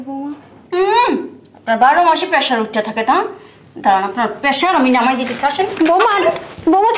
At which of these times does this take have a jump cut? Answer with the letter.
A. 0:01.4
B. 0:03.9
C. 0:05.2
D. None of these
D